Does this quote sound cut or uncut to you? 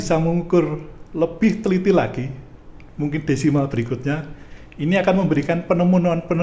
uncut